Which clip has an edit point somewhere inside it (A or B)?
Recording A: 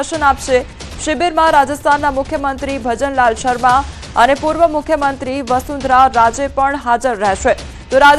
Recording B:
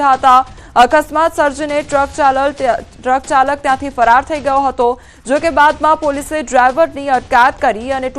B